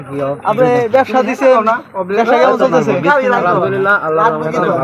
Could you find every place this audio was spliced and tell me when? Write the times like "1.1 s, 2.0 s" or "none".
none